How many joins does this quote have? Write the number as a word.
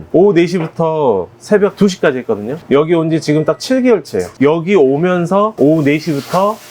two